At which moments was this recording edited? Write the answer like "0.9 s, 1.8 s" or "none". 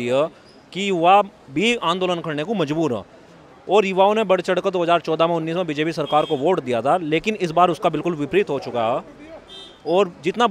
none